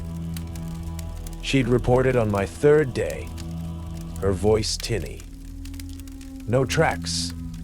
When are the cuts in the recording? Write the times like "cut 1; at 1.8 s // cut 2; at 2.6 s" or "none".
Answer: cut 1; at 1.0 s